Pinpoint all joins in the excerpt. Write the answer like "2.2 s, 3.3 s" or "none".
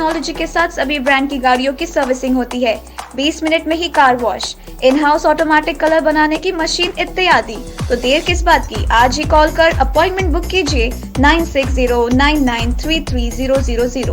none